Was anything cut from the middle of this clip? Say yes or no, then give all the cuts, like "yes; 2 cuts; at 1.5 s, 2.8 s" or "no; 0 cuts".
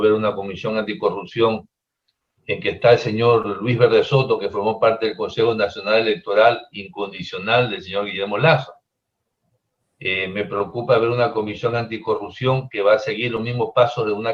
no; 0 cuts